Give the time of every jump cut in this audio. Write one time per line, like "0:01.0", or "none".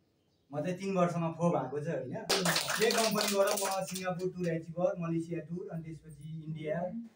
0:02.3